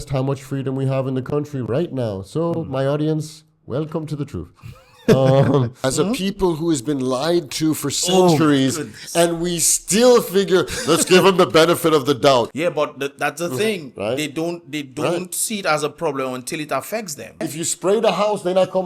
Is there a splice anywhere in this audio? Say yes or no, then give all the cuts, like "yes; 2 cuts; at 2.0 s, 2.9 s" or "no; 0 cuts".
yes; 3 cuts; at 5.9 s, 12.5 s, 17.5 s